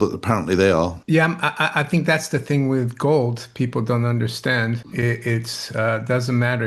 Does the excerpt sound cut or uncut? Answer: cut